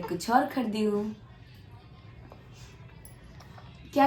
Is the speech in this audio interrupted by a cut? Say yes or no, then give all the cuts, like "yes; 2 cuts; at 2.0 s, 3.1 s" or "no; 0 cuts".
no; 0 cuts